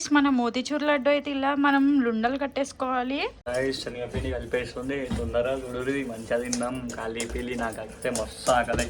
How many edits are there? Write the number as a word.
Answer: one